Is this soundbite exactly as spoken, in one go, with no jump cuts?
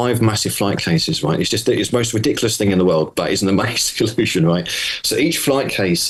yes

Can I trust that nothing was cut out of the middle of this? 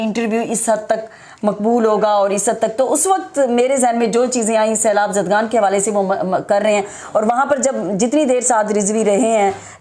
yes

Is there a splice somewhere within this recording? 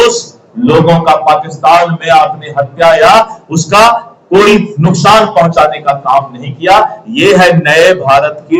no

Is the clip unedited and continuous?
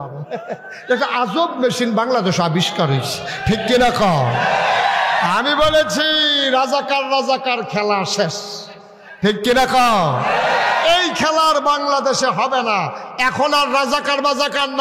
yes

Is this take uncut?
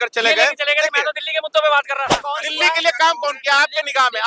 no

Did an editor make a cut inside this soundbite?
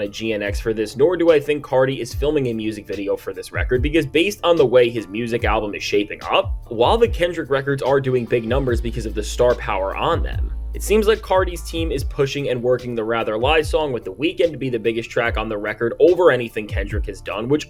no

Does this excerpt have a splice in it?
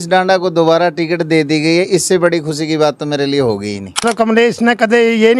yes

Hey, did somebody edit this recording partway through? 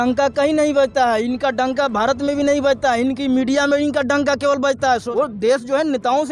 yes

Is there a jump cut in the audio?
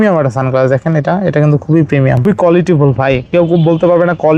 yes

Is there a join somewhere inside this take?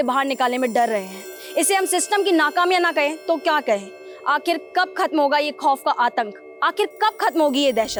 no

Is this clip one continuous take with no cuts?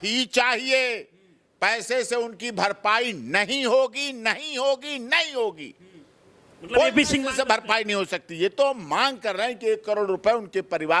yes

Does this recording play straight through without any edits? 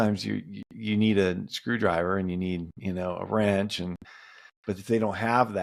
yes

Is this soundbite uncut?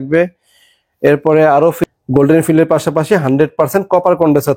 no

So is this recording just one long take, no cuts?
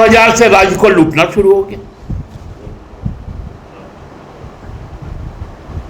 yes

